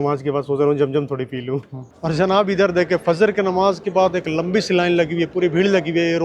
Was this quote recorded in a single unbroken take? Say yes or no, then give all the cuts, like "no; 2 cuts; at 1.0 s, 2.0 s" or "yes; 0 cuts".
no; 1 cut; at 1.9 s